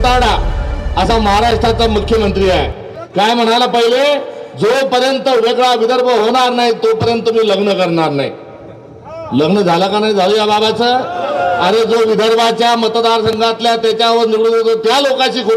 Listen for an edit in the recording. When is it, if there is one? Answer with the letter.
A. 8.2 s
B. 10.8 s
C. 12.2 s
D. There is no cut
D